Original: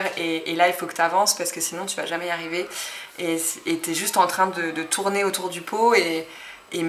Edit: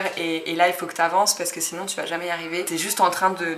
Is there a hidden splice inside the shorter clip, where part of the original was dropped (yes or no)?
yes